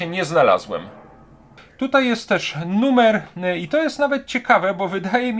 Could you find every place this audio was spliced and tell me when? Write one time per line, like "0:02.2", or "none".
0:01.6